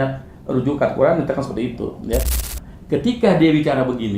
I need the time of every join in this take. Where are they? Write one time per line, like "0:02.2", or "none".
0:02.3